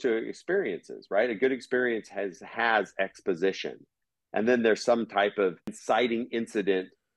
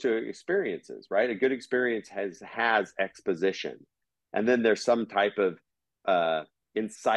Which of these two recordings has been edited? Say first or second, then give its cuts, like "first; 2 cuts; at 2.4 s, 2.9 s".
first; 1 cut; at 5.8 s